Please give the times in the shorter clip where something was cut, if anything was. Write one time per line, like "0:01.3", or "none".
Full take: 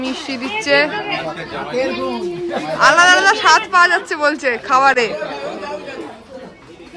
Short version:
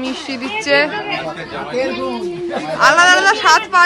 none

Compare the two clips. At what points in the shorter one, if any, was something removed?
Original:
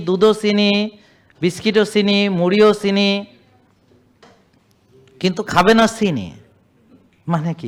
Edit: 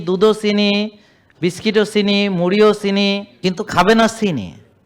0:03.3

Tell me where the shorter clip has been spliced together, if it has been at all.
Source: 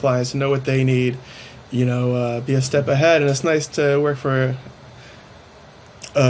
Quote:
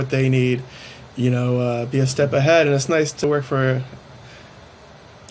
0:03.2

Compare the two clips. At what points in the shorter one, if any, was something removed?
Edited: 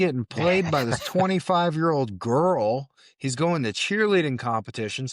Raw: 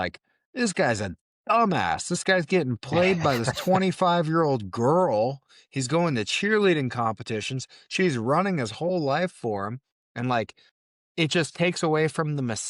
none

